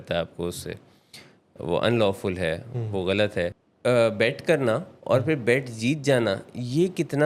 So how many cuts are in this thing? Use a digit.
1